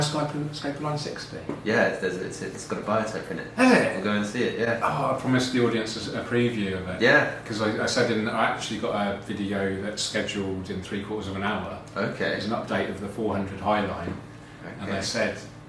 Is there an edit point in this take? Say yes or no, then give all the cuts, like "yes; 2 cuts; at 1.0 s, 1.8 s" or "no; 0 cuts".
no; 0 cuts